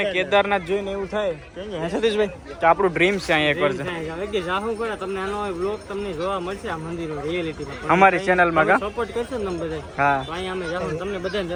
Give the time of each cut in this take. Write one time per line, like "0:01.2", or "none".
none